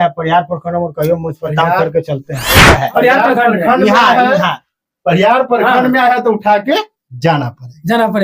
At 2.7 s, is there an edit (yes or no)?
yes